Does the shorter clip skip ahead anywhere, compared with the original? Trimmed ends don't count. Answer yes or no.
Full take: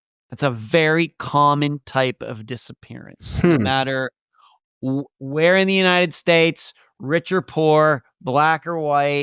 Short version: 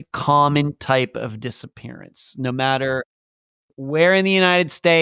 yes